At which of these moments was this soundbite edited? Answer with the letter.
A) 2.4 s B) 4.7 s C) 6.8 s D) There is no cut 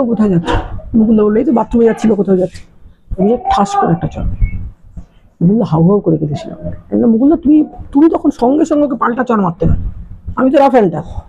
D